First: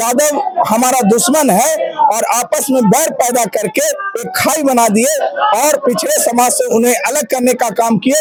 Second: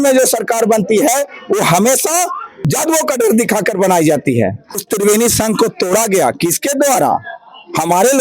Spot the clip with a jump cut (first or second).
second